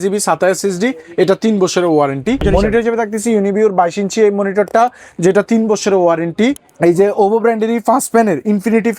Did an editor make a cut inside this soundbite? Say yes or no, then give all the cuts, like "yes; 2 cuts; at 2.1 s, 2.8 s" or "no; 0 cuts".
yes; 2 cuts; at 2.4 s, 6.7 s